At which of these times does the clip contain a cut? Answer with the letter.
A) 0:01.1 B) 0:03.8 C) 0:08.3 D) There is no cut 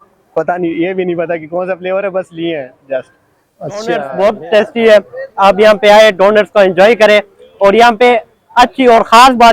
B